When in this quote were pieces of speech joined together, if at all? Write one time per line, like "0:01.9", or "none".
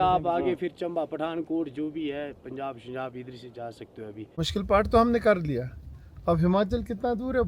0:04.5